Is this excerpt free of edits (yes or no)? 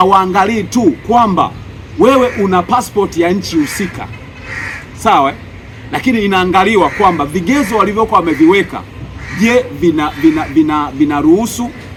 yes